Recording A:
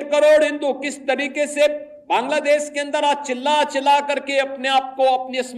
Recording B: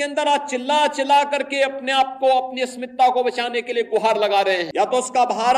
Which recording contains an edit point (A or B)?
B